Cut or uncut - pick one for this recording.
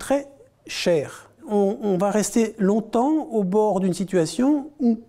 cut